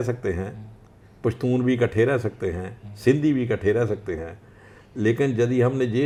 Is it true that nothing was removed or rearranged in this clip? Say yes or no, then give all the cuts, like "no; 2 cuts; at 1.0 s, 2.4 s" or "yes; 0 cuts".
yes; 0 cuts